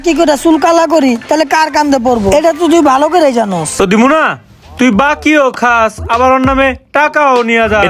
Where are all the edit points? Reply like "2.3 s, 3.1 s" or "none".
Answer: 3.7 s